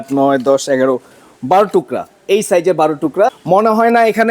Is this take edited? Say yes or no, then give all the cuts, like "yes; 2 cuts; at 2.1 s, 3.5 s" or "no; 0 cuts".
yes; 1 cut; at 3.4 s